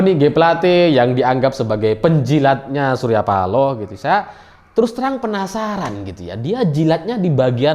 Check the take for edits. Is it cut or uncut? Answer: uncut